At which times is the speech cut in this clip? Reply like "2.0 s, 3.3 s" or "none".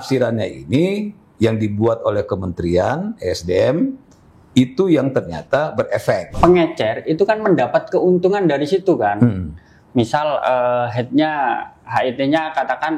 6.4 s